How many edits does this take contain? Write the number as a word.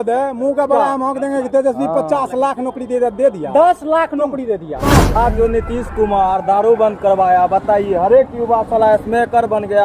one